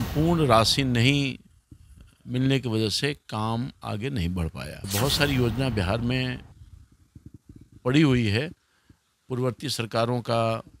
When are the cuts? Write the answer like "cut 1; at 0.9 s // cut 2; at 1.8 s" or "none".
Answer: cut 1; at 4.7 s

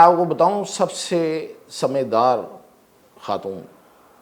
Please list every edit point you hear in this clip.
none

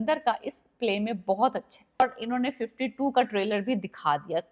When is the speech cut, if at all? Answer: cut 1; at 2.0 s

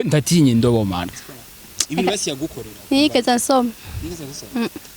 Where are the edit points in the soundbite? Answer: cut 1; at 1.0 s

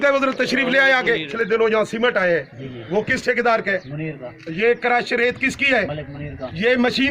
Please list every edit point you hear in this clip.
cut 1; at 1.3 s

